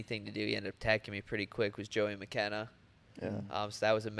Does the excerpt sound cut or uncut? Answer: uncut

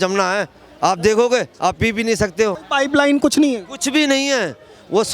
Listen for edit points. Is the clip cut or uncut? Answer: cut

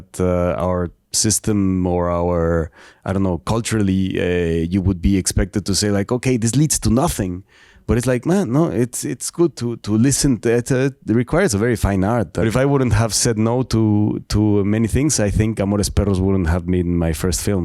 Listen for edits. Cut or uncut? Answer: cut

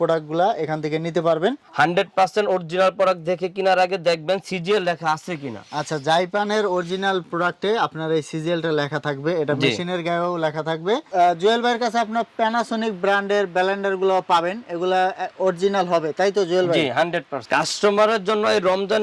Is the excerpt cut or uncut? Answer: cut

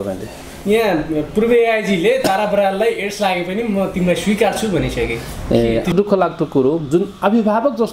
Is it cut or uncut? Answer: cut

